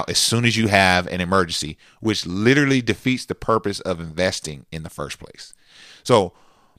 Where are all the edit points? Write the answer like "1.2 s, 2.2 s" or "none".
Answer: none